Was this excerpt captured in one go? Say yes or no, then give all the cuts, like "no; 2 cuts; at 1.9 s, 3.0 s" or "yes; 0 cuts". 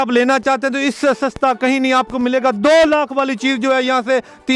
yes; 0 cuts